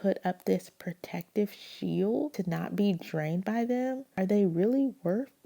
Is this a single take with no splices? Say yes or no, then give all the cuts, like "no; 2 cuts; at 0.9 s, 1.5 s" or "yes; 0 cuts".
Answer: no; 2 cuts; at 2.4 s, 4.1 s